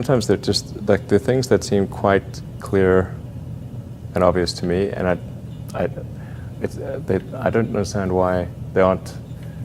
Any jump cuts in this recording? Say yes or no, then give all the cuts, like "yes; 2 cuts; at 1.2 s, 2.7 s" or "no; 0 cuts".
yes; 1 cut; at 3.2 s